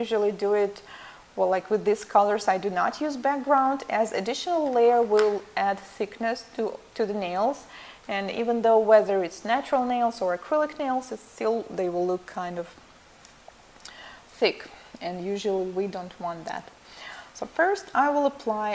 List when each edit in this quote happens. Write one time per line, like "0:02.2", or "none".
0:11.5